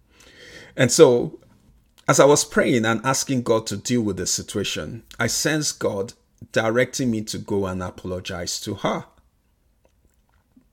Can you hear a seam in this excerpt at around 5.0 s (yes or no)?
no